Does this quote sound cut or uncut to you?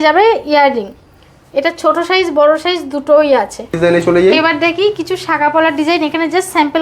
cut